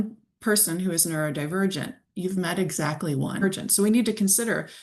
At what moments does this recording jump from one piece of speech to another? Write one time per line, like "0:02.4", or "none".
0:03.4